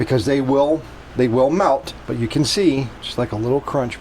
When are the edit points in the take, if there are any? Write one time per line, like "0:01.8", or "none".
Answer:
0:03.0

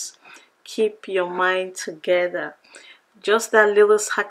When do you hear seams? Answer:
none

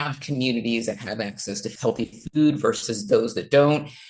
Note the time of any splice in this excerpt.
0:01.6

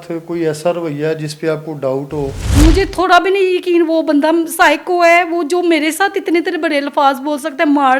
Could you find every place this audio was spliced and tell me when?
0:02.4

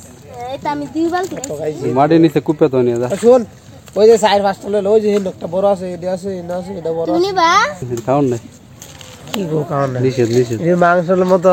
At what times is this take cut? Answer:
0:07.9

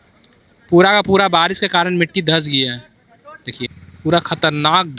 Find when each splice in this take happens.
0:03.9

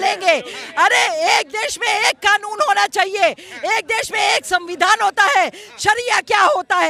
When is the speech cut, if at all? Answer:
none

